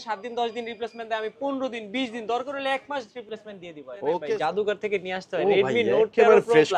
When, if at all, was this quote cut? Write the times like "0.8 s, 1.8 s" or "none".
3.2 s, 4.2 s

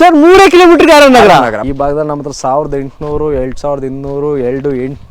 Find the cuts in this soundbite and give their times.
1.6 s

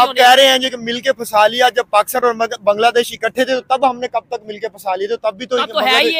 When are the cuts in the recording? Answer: none

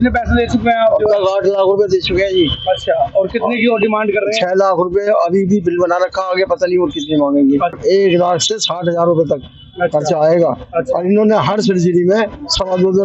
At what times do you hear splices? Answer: 7.8 s

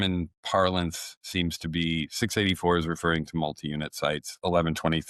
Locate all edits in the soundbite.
none

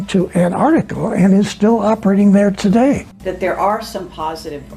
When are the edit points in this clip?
3.1 s

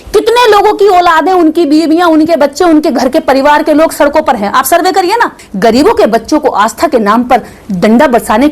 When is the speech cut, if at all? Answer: 5.4 s

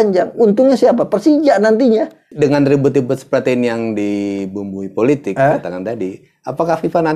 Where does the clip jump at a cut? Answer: 2.2 s

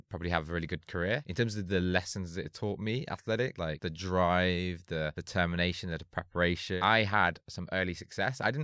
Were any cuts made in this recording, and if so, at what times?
1.3 s, 3.7 s, 5.2 s, 6.8 s

